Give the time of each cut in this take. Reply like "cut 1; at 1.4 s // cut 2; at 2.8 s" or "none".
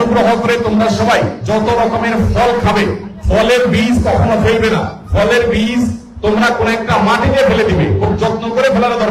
none